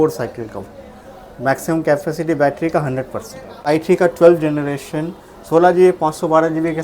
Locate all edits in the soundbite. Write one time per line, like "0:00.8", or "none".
0:03.6